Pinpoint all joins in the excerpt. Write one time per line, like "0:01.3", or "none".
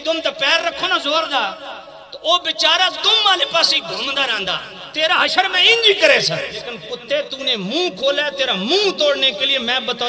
0:06.9